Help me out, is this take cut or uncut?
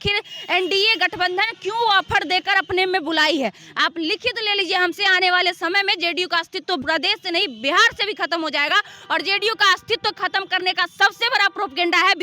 cut